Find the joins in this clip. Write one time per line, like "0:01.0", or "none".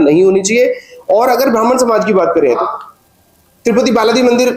0:02.6